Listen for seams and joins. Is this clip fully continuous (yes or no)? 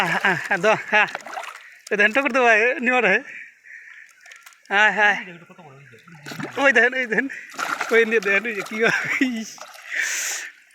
yes